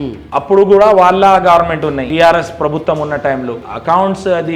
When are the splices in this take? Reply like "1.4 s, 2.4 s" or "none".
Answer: 2.1 s, 3.7 s